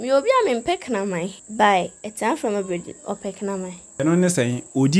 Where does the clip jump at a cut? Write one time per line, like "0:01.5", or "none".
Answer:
0:01.4
0:04.0